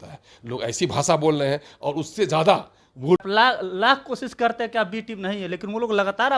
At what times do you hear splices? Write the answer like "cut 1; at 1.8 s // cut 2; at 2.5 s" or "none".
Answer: cut 1; at 3.2 s